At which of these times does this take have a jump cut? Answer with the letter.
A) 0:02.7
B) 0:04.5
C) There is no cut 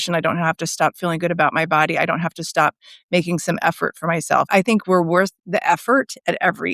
B